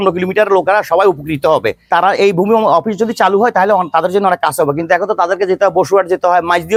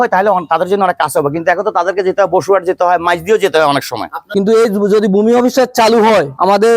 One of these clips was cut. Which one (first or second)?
second